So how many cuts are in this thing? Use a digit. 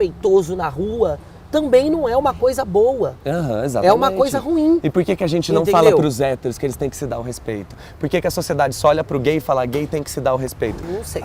0